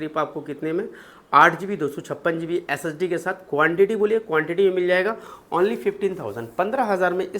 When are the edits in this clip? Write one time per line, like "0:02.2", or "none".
none